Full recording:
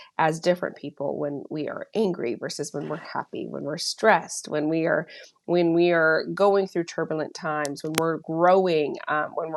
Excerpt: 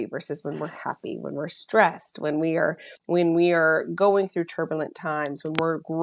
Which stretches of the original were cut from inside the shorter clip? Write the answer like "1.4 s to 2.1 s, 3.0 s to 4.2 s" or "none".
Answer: 5.2 s to 5.3 s